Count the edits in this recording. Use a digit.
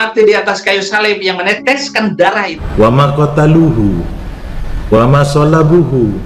1